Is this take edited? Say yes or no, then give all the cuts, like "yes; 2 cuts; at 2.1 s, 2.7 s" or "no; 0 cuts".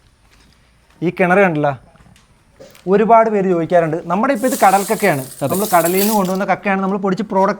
yes; 1 cut; at 2.7 s